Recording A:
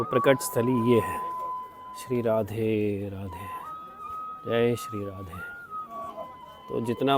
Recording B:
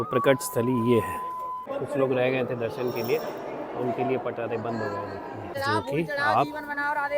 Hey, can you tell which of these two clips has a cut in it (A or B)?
B